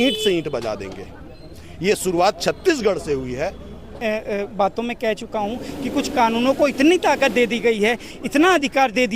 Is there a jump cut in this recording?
yes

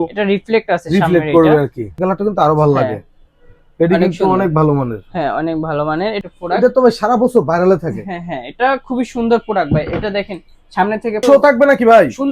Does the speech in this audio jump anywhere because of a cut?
yes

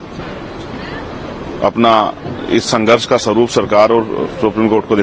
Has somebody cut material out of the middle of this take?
no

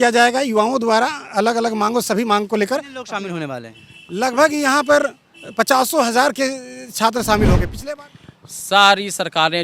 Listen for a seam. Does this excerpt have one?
yes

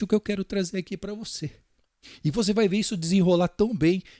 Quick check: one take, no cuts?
yes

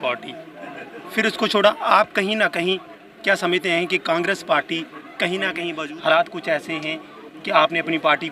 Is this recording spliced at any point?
yes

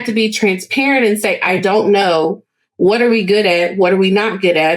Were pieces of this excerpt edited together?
no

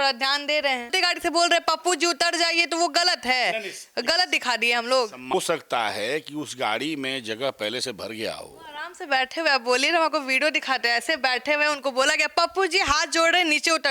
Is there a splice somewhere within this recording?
yes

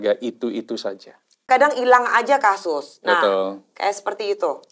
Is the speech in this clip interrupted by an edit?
yes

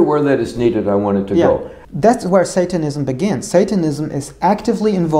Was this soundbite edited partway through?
yes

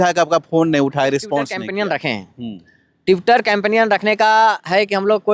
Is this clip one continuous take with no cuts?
no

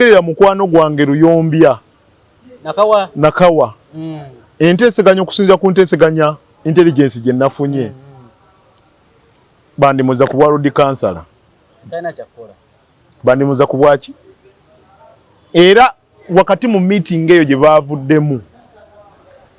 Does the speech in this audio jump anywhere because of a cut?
no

